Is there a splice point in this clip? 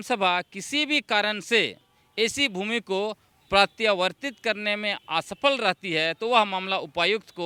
no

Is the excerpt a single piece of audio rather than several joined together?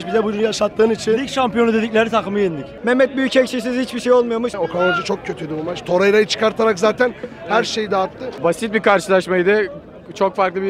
no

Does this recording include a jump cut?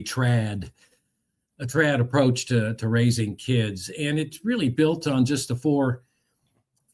no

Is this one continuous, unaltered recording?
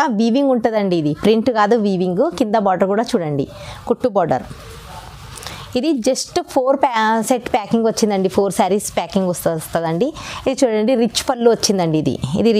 yes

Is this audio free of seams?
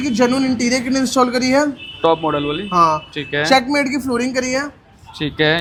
yes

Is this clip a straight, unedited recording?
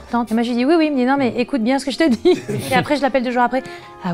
yes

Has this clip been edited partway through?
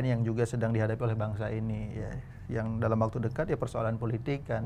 no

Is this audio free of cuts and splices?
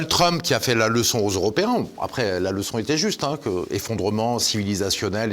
yes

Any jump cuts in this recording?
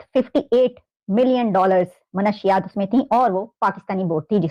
no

